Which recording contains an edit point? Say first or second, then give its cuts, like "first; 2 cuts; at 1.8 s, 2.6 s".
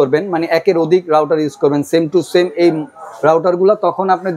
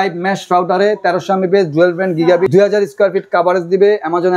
second; 1 cut; at 2.5 s